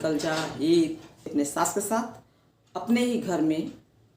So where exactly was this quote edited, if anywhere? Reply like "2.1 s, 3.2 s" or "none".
1.2 s